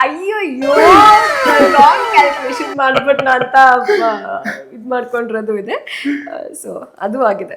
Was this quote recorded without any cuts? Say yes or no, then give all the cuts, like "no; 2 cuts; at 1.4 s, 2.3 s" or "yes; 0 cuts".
yes; 0 cuts